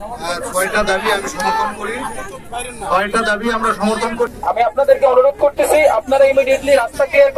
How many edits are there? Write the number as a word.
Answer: one